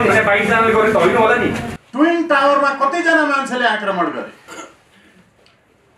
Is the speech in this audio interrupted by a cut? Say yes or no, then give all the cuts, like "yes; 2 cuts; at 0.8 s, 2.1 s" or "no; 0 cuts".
yes; 1 cut; at 1.6 s